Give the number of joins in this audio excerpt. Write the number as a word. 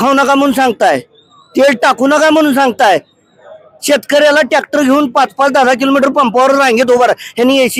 zero